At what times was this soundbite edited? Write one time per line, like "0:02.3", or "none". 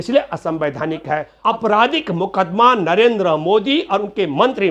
0:01.3